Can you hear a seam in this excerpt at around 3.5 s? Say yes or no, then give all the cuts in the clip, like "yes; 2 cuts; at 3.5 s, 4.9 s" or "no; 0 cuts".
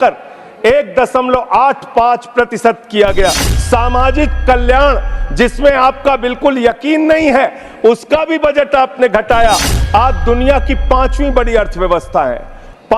yes; 2 cuts; at 3.5 s, 9.7 s